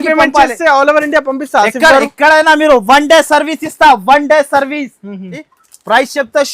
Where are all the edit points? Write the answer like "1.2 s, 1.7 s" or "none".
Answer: 5.4 s

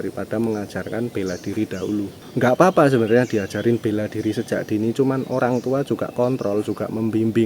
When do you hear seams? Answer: 2.2 s

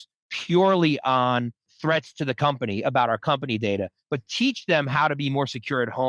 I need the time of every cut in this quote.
1.7 s

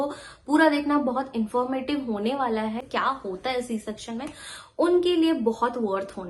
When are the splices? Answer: 2.8 s

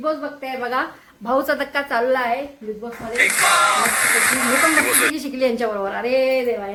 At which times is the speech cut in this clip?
none

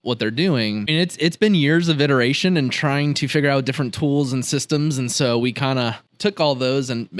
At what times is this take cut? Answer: 0.9 s, 6.0 s

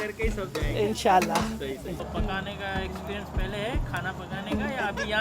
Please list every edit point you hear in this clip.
2.0 s

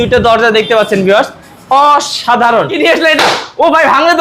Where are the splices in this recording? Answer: 2.8 s

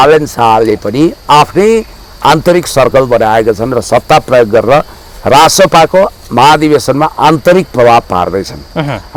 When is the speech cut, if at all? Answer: none

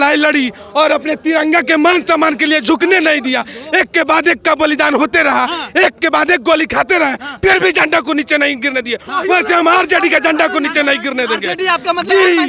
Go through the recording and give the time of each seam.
none

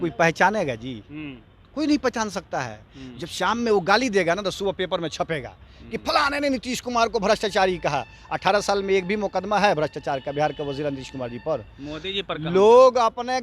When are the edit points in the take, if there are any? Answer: none

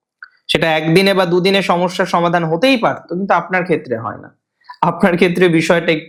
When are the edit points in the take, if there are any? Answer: none

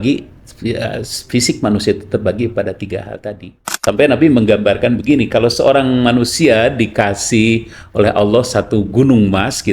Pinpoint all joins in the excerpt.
3.7 s

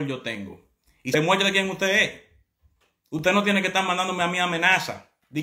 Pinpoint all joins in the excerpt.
1.1 s

